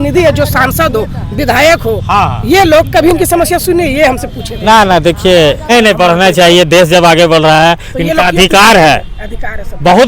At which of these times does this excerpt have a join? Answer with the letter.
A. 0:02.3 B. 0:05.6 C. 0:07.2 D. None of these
B